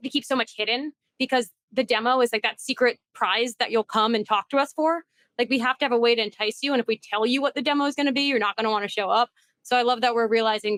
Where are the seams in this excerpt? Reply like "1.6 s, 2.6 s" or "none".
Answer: none